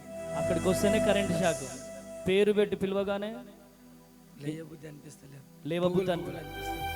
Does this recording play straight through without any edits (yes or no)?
yes